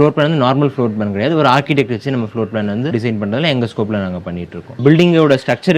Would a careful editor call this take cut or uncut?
cut